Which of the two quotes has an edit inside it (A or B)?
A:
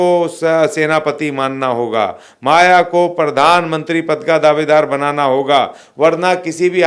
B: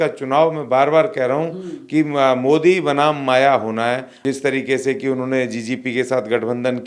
B